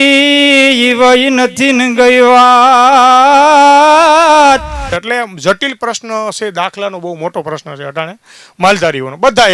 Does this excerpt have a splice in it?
yes; 1 cut; at 5.0 s

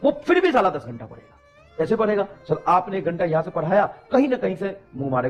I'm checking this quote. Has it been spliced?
no; 0 cuts

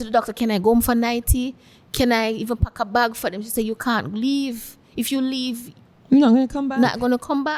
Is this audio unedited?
yes; 0 cuts

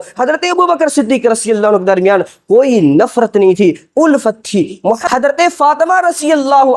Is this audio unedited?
no; 1 cut; at 5.0 s

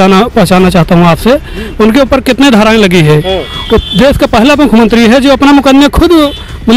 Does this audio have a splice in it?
no; 0 cuts

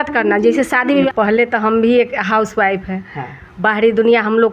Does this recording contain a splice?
yes; 1 cut; at 1.1 s

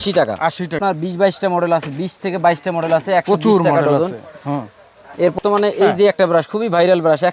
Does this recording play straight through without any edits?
no; 2 cuts; at 0.8 s, 5.4 s

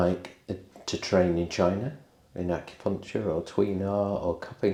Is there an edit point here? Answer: no; 0 cuts

